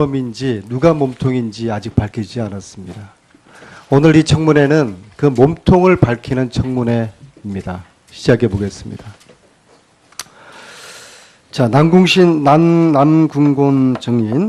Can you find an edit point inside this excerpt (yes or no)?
no